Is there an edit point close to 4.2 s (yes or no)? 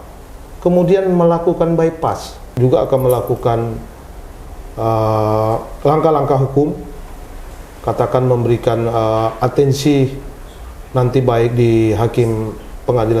no